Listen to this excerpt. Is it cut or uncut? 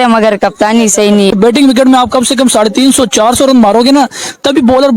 cut